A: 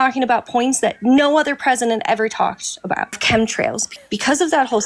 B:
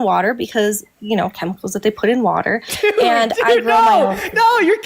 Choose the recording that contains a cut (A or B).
A